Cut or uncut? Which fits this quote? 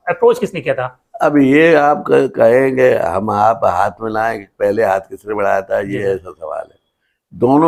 uncut